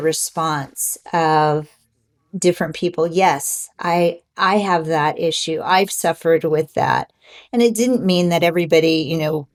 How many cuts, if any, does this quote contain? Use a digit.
0